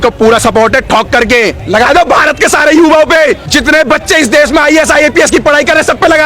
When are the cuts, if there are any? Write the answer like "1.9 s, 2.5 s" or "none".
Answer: 1.6 s, 3.4 s